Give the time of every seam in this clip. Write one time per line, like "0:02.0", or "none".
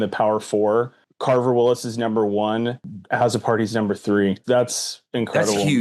0:01.0
0:03.0
0:04.4